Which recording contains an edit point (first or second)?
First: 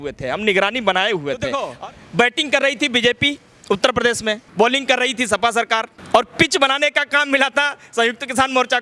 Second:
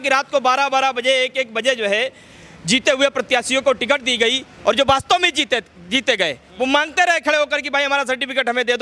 first